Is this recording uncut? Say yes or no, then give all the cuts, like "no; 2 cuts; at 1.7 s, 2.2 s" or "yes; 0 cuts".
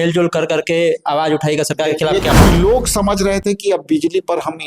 no; 1 cut; at 2.4 s